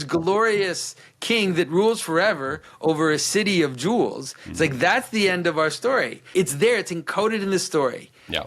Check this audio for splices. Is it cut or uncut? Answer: cut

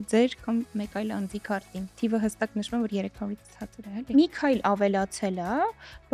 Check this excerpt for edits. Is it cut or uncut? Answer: cut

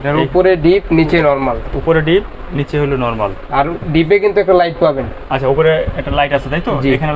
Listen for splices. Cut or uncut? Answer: uncut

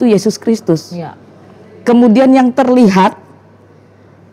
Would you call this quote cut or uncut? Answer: uncut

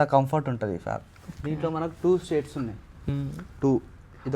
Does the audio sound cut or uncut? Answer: uncut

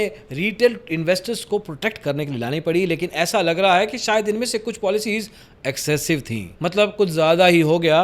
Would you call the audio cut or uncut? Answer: uncut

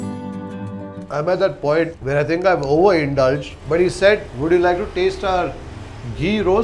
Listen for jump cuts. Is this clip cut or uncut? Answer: uncut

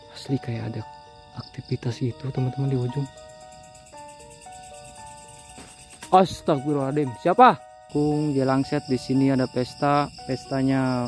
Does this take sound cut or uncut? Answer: cut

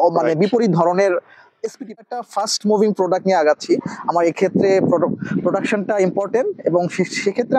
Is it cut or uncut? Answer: cut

